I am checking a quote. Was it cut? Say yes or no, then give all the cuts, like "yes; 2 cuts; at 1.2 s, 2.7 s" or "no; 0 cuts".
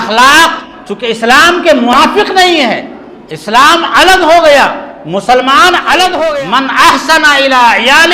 yes; 1 cut; at 6.4 s